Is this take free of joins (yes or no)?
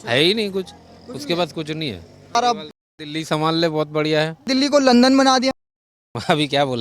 no